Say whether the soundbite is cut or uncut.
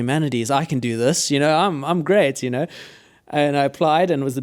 uncut